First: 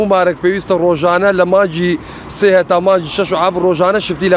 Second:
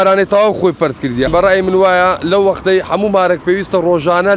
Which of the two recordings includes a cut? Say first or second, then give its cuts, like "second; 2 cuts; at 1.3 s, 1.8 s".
second; 1 cut; at 1.3 s